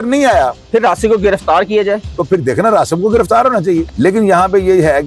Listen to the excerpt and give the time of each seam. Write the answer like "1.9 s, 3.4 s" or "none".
3.9 s

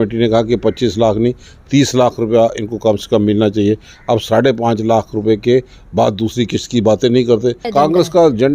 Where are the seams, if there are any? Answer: 7.6 s

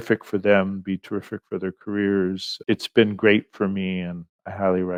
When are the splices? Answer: none

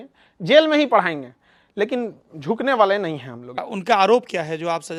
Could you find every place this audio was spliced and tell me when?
none

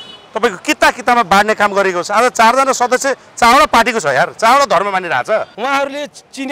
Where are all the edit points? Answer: 5.5 s

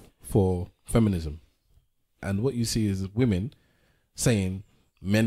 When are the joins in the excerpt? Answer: 2.1 s

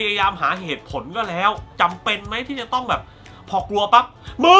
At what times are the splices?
1.6 s

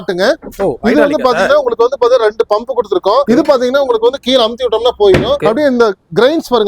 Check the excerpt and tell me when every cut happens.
3.3 s, 5.4 s

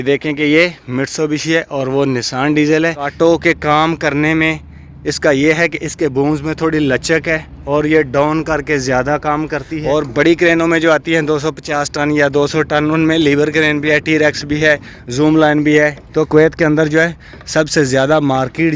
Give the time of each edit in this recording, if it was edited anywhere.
3.1 s, 9.7 s, 16.0 s

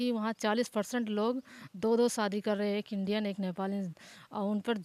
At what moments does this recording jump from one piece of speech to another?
none

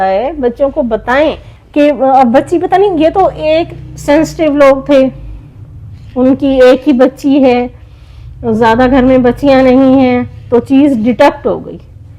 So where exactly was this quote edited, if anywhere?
1.5 s

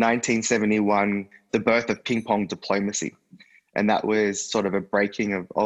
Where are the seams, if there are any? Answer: 1.3 s

